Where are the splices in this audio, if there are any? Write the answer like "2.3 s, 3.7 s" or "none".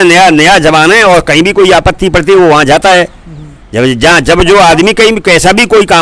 none